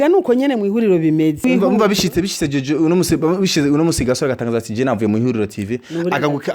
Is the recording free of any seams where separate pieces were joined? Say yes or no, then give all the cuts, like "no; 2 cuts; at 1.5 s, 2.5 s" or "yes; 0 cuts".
no; 1 cut; at 1.4 s